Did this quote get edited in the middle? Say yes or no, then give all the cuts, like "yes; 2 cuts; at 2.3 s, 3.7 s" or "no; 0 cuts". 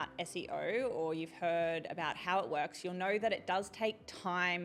no; 0 cuts